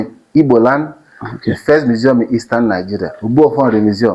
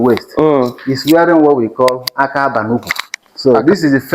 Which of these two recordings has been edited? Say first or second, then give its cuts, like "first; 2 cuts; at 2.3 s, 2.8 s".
second; 1 cut; at 3.2 s